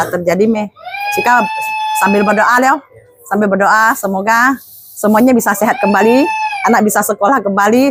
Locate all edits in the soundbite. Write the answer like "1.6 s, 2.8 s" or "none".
none